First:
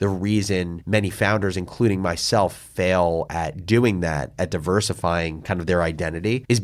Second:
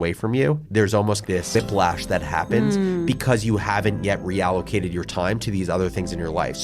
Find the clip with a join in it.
second; 1 cut; at 1.3 s

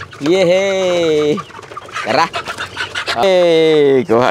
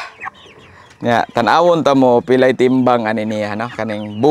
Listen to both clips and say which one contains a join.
first; 1 cut; at 3.2 s

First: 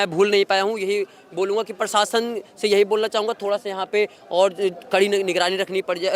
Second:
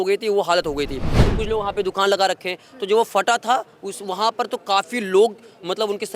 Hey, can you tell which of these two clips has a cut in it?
second; 1 cut; at 1.2 s

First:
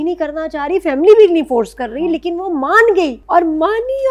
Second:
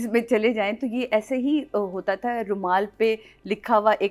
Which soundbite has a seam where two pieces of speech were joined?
first; 1 cut; at 3.2 s

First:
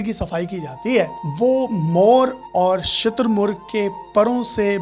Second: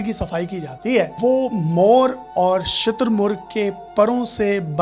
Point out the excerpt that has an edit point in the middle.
second; 1 cut; at 1.1 s

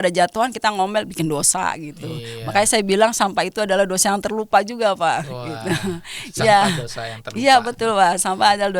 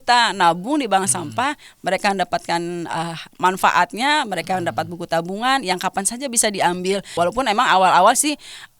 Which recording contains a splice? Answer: second; 1 cut; at 7.1 s

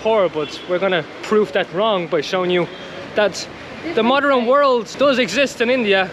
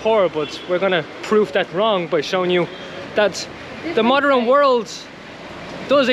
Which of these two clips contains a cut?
first; 1 cut; at 4.9 s

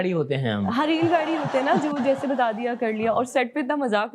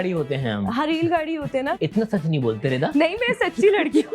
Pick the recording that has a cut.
second; 1 cut; at 1.7 s

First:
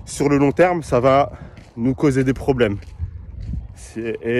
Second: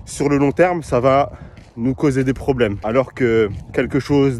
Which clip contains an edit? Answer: second; 1 cut; at 2.8 s

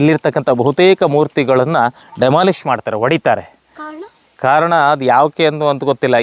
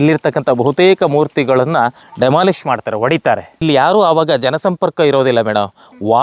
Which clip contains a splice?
second; 1 cut; at 3.6 s

